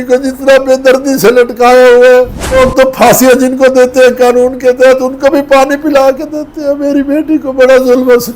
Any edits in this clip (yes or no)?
yes